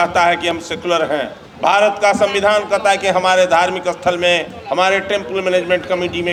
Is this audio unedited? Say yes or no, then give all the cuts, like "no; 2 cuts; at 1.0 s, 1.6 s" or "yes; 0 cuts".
yes; 0 cuts